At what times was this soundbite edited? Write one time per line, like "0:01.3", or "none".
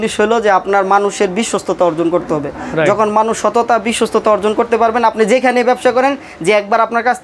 none